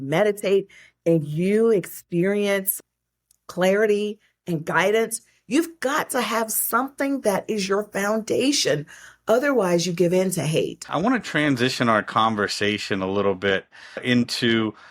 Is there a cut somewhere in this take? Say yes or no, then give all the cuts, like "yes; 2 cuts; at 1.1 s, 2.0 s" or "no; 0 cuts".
yes; 1 cut; at 10.8 s